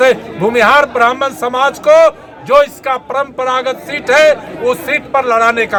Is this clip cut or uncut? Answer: uncut